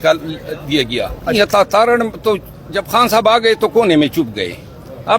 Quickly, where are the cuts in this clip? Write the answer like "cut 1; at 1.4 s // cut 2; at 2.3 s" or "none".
cut 1; at 1.3 s